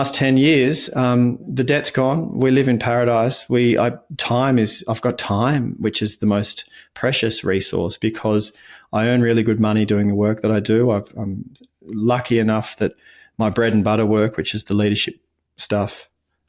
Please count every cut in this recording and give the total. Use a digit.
0